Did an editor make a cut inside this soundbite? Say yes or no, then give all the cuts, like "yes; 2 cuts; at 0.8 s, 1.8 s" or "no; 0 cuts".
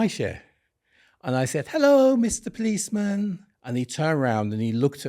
yes; 1 cut; at 3.5 s